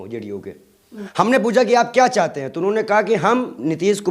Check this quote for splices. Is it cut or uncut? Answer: cut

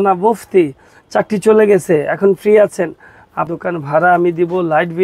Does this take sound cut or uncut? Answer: cut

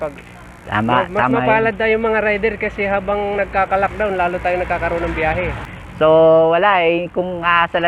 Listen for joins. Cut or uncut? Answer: cut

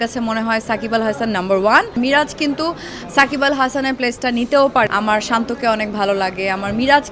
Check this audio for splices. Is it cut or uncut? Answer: cut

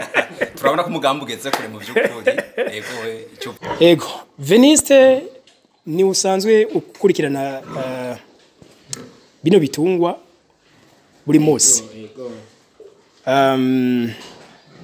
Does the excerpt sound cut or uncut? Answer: cut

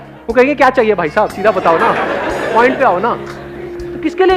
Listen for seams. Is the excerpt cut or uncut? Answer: uncut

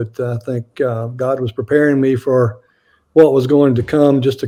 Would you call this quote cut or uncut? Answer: uncut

